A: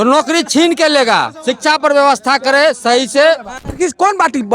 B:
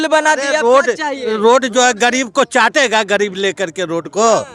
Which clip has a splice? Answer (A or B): A